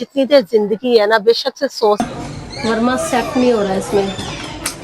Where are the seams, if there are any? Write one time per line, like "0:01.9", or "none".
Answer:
0:02.0